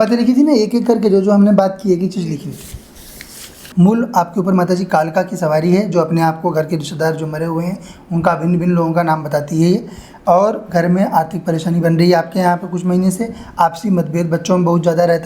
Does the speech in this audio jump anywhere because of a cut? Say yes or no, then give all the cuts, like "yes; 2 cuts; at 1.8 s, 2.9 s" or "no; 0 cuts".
yes; 1 cut; at 3.6 s